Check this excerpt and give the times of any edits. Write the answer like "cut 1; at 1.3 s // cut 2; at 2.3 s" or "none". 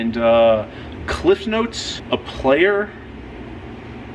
cut 1; at 1.9 s